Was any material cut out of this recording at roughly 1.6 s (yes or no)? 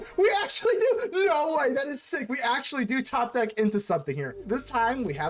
no